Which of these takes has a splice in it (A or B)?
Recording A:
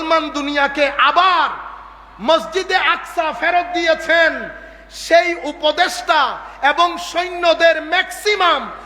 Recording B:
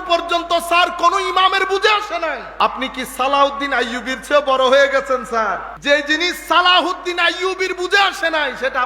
B